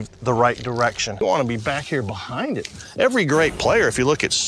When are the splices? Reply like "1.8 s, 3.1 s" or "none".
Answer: 1.2 s

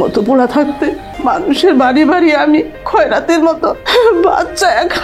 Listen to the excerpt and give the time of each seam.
1.1 s, 3.8 s

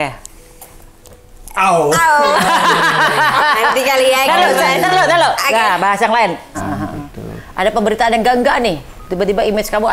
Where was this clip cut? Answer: 6.6 s

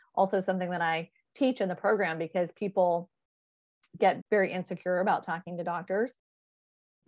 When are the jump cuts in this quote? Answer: 4.2 s

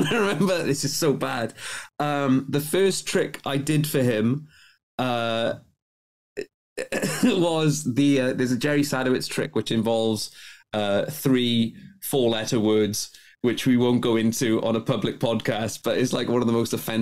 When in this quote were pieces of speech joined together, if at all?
none

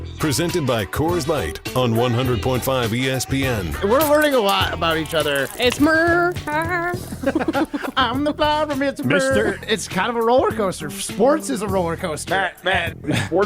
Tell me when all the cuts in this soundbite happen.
3.7 s

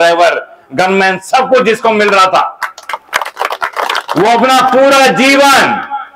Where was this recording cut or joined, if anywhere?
none

